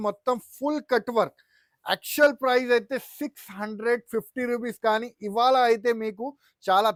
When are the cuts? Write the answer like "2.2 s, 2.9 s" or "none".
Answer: none